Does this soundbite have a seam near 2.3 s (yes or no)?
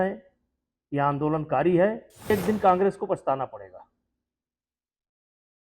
yes